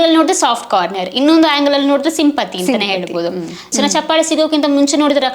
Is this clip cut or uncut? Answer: cut